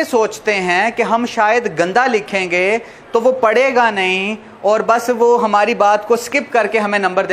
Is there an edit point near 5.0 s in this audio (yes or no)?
no